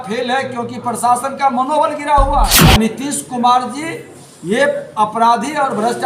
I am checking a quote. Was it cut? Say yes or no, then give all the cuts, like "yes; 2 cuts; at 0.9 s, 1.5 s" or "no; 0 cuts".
yes; 1 cut; at 2.6 s